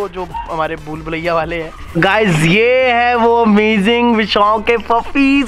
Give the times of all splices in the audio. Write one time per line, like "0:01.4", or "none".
0:01.8